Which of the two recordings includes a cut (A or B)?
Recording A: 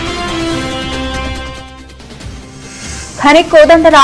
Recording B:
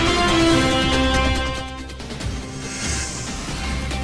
A